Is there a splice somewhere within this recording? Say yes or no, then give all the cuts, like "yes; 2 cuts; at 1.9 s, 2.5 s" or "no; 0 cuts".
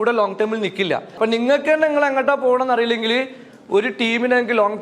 yes; 1 cut; at 1.1 s